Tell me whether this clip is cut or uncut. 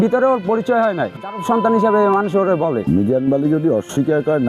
cut